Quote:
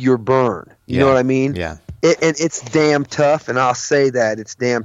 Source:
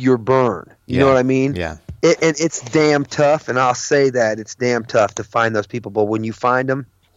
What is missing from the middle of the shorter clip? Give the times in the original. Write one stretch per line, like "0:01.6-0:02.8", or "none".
none